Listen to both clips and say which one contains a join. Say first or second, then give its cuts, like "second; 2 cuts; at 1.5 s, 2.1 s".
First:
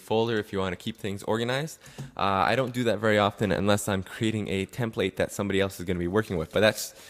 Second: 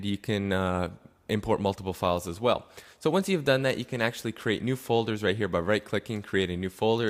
first; 1 cut; at 3.0 s